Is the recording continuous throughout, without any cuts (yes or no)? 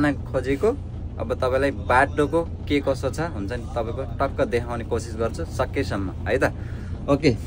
yes